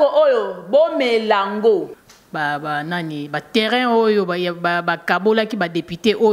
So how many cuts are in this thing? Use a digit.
1